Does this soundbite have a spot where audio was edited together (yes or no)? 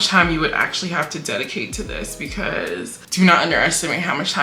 yes